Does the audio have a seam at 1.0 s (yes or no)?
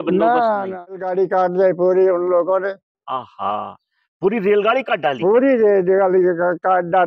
yes